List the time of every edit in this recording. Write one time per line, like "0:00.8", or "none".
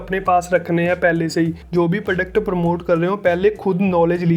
0:01.6